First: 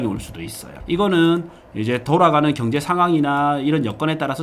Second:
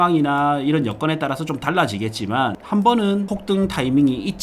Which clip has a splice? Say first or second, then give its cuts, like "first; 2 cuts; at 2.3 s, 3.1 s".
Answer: second; 2 cuts; at 2.6 s, 3.3 s